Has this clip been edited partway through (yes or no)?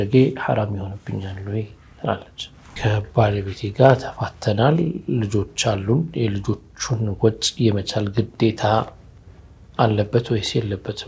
yes